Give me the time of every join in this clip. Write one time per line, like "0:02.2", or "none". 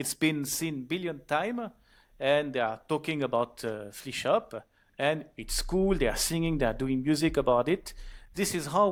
none